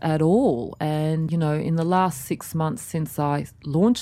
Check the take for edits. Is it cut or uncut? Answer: cut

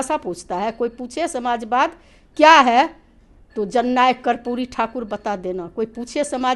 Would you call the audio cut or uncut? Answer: uncut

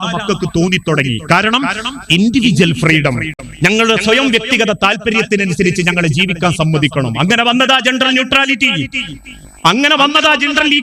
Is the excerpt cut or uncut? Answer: uncut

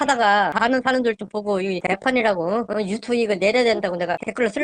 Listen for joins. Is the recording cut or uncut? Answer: uncut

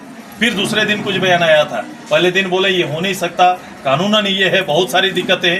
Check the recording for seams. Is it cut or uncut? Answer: uncut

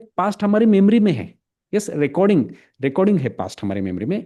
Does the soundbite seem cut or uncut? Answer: uncut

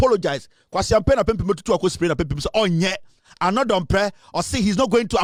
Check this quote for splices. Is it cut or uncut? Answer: uncut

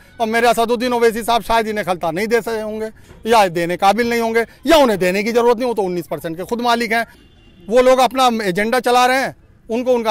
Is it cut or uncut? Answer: cut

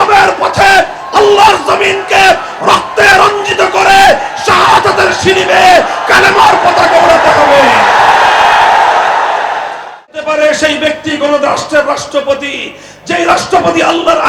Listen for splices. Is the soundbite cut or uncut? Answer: cut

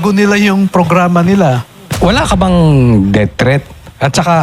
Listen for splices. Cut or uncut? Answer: cut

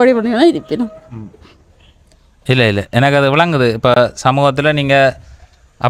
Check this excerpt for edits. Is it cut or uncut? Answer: uncut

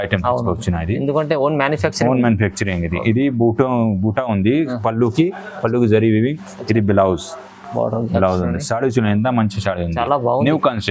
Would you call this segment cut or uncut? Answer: uncut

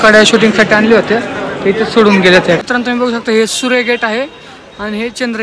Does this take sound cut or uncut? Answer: cut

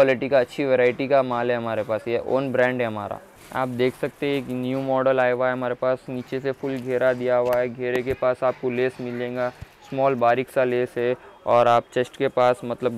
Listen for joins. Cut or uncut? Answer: uncut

